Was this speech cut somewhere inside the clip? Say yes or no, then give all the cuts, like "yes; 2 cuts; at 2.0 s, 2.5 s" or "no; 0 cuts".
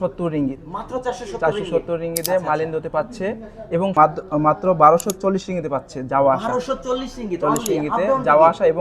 yes; 1 cut; at 3.9 s